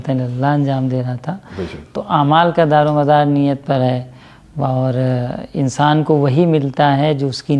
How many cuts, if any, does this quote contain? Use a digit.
0